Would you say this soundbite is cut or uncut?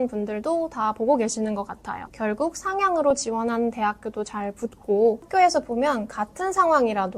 cut